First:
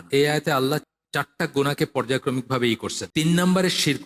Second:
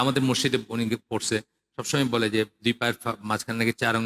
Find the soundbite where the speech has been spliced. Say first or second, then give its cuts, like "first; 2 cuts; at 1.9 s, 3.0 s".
first; 2 cuts; at 1.0 s, 3.0 s